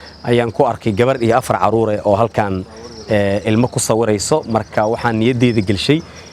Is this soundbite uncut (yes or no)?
yes